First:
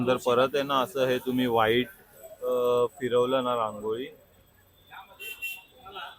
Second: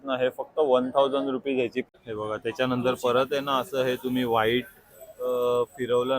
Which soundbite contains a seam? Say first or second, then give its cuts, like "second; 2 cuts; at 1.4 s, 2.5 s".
second; 1 cut; at 1.9 s